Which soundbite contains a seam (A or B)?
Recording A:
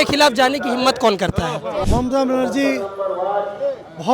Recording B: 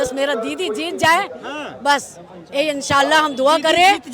A